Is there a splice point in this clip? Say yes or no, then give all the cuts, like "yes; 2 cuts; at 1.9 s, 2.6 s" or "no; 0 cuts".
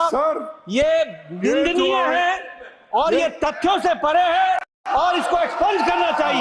no; 0 cuts